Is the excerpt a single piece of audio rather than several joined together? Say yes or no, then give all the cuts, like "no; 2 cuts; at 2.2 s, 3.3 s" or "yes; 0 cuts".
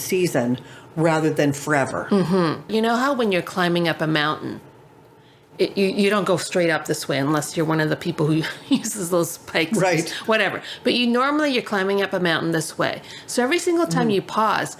no; 1 cut; at 2.7 s